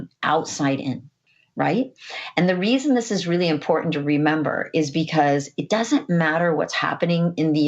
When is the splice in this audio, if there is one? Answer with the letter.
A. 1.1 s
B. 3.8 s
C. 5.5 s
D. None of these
A